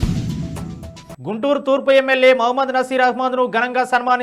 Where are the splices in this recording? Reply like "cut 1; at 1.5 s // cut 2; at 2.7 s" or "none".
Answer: cut 1; at 1.0 s